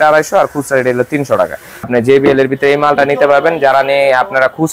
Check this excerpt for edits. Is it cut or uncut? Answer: cut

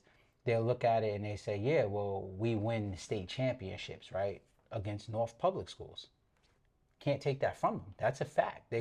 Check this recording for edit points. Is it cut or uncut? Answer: uncut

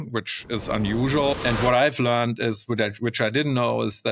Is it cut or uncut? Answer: cut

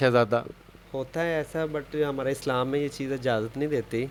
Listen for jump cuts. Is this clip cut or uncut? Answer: uncut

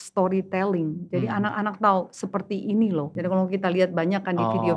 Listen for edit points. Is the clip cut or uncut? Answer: cut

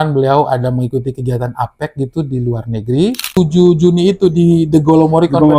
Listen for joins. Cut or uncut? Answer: cut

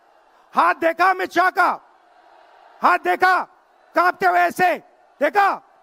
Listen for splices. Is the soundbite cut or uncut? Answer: uncut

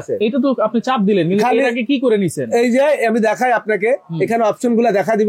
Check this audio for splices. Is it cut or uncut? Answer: uncut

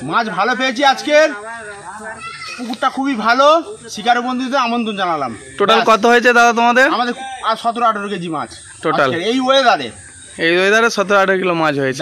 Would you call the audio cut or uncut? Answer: uncut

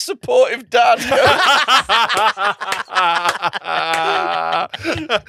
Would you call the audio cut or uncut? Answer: uncut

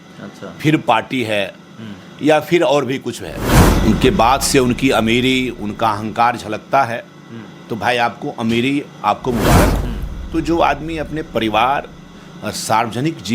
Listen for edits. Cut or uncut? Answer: cut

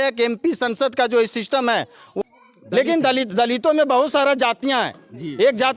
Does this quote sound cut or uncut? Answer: cut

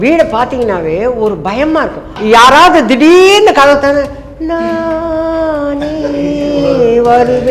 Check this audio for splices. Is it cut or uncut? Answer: cut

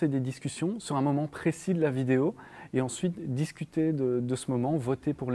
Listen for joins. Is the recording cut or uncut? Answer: uncut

